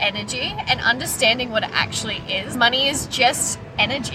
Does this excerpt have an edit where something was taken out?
yes; 1 cut; at 2.5 s

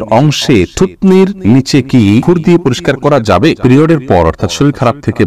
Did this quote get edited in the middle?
yes; 3 cuts; at 1.4 s, 2.2 s, 3.6 s

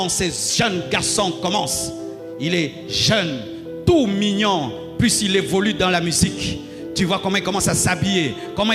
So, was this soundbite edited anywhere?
no; 0 cuts

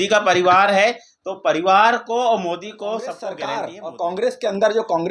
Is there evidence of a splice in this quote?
yes; 1 cut; at 3.4 s

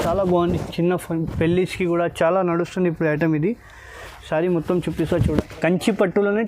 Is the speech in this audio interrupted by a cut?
yes; 1 cut; at 5.2 s

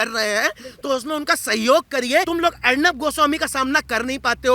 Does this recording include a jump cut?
yes; 1 cut; at 2.3 s

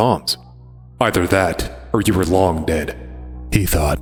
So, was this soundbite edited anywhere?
no; 0 cuts

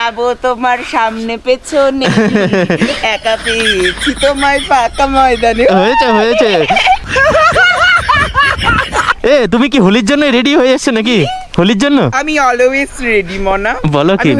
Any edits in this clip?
no; 0 cuts

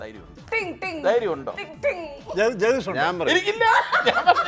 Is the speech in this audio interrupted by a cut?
no; 0 cuts

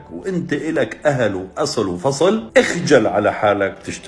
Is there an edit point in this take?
yes; 1 cut; at 2.5 s

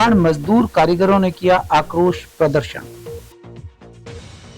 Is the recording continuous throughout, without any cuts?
no; 1 cut; at 2.8 s

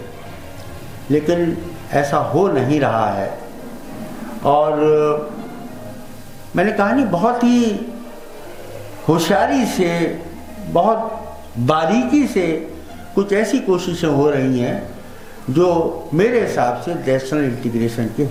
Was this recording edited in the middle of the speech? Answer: no; 0 cuts

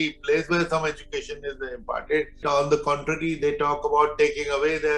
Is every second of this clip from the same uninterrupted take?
no; 1 cut; at 2.4 s

